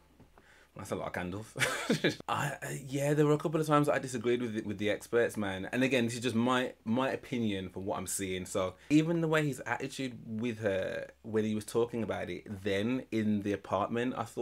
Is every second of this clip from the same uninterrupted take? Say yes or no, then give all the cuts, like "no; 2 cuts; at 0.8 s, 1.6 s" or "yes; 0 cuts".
no; 3 cuts; at 2.1 s, 4.7 s, 8.8 s